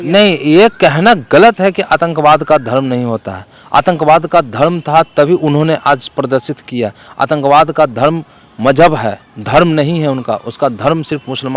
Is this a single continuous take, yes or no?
yes